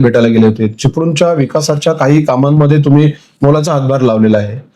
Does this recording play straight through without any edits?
yes; 0 cuts

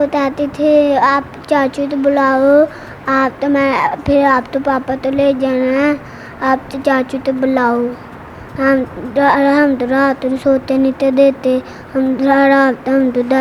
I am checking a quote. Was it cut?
no; 0 cuts

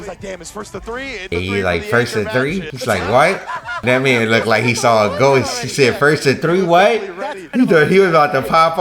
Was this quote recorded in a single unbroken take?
no; 1 cut; at 1.3 s

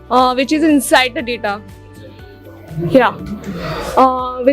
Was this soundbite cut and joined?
no; 0 cuts

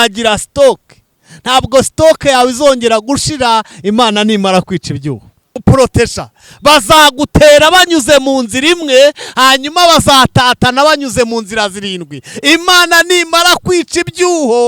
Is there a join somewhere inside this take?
yes; 1 cut; at 5.6 s

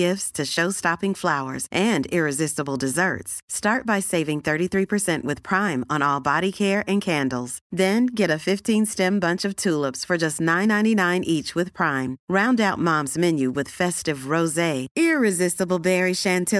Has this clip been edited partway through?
no; 0 cuts

